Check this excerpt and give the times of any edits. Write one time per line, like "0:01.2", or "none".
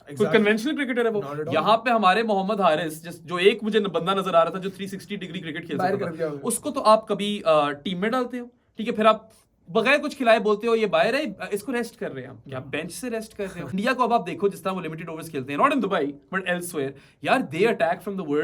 0:13.7